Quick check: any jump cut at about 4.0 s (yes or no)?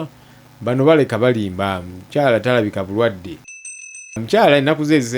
yes